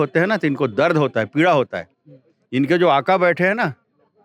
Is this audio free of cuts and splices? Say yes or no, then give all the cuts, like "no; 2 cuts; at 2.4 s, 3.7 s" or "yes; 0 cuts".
yes; 0 cuts